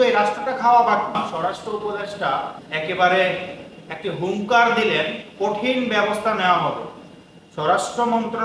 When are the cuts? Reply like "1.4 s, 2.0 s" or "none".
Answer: 1.3 s